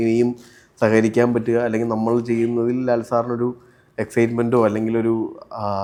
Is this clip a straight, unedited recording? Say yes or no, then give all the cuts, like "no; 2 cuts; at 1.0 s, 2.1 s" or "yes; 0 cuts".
yes; 0 cuts